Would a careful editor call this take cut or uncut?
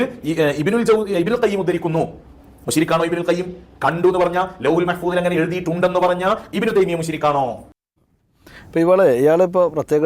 uncut